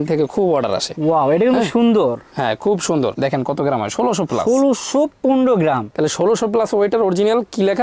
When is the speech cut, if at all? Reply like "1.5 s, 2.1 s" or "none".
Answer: 3.2 s